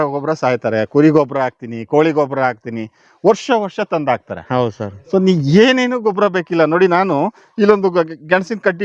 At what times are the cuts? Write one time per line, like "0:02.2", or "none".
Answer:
none